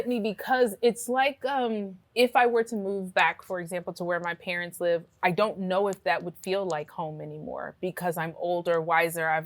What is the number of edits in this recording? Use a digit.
1